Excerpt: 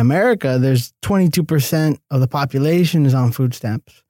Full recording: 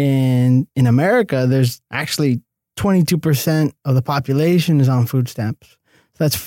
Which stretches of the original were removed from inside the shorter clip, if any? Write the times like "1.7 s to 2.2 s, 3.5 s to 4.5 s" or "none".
1.8 s to 2.7 s